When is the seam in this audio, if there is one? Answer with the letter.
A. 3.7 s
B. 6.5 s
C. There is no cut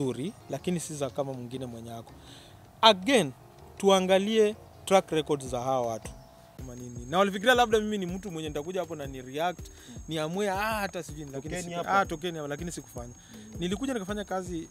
B